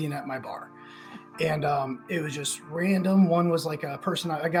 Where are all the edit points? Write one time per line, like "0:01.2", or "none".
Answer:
none